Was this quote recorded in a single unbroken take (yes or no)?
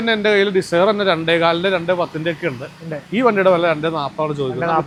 yes